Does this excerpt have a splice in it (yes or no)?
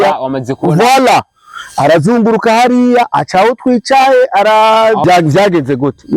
yes